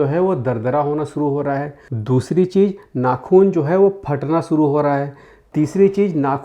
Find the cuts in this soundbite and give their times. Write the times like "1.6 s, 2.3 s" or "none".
none